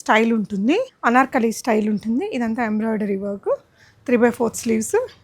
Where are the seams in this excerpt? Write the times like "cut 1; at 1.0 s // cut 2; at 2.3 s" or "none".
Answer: cut 1; at 0.9 s